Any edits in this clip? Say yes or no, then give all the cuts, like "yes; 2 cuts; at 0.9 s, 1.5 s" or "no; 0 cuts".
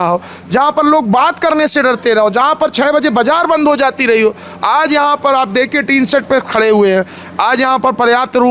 no; 0 cuts